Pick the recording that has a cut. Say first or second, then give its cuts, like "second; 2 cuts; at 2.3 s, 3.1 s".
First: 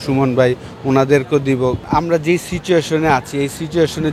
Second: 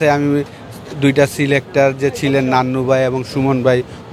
first; 1 cut; at 1.8 s